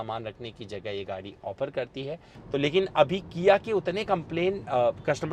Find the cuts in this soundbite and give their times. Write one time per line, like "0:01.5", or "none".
0:02.3